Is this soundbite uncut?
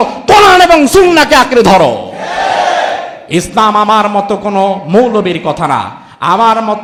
yes; 0 cuts

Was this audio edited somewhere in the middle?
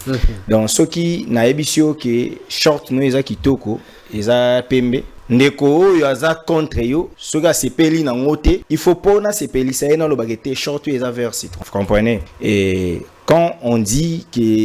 yes; 5 cuts; at 5.1 s, 7.2 s, 8.7 s, 11.5 s, 12.3 s

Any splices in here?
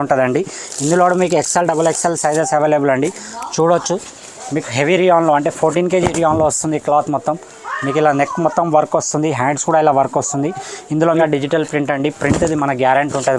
yes; 1 cut; at 11.2 s

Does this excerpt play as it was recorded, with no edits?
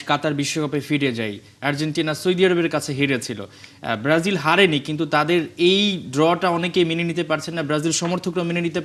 yes; 0 cuts

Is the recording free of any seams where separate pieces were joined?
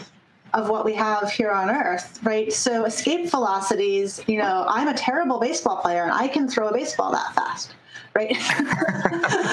yes; 0 cuts

